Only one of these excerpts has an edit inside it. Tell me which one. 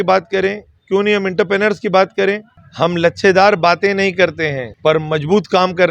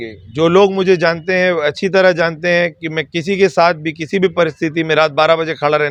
first; 2 cuts; at 2.6 s, 4.7 s

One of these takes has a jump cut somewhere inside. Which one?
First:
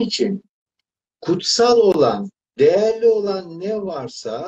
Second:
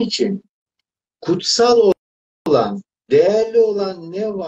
first; 1 cut; at 2.0 s

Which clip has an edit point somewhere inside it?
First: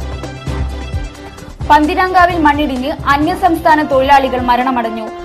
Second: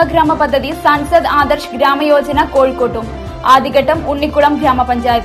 first; 1 cut; at 0.9 s

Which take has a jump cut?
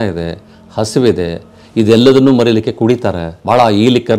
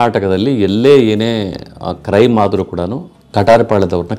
first; 1 cut; at 3.3 s

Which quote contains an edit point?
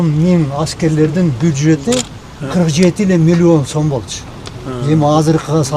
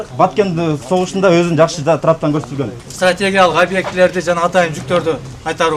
second; 1 cut; at 2.8 s

